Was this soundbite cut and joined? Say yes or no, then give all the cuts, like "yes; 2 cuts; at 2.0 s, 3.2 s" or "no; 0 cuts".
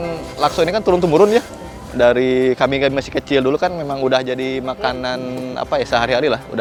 no; 0 cuts